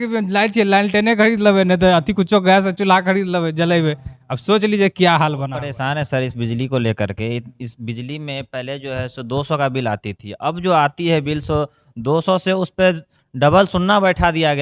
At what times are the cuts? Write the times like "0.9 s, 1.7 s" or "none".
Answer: 5.6 s